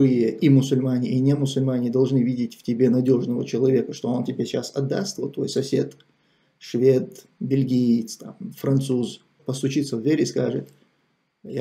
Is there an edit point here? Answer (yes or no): yes